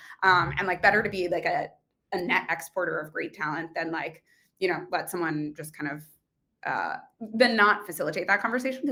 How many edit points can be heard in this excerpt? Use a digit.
0